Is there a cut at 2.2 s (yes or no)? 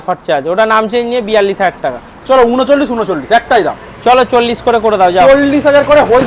no